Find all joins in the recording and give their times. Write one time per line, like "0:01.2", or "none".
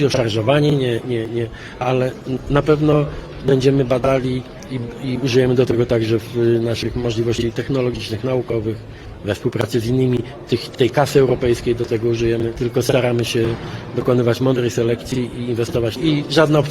0:12.6
0:15.9